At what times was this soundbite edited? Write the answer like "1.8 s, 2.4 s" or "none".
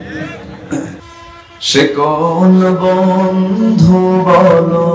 1.1 s